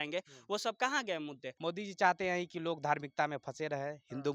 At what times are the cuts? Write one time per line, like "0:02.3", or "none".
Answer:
0:01.5